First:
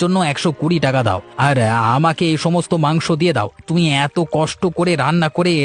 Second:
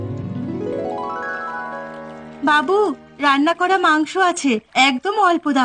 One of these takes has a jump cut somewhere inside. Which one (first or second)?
second